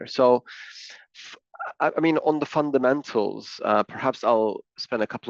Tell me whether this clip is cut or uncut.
uncut